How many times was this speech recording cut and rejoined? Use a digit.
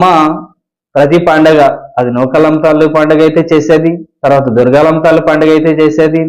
0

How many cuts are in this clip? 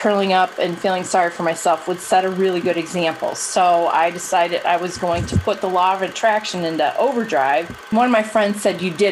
1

